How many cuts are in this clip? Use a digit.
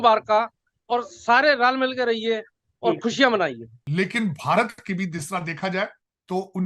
1